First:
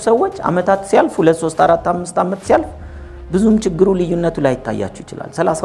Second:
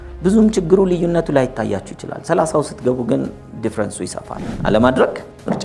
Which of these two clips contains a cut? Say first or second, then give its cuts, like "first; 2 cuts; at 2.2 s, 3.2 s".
second; 1 cut; at 4.6 s